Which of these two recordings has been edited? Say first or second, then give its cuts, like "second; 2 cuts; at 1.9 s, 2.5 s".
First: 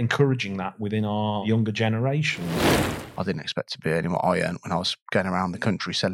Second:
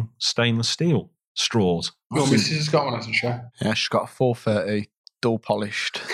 first; 2 cuts; at 2.5 s, 3.1 s